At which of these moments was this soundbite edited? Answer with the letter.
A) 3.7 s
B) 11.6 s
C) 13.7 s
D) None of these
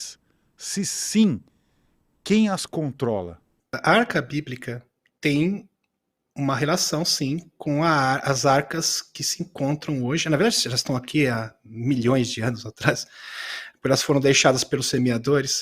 A